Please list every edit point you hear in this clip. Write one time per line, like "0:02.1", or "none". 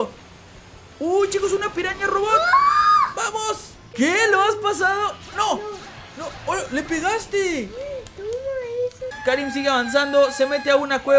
0:03.8
0:09.1